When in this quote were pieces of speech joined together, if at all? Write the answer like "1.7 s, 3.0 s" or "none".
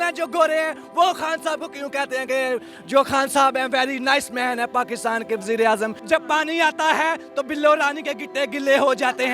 6.0 s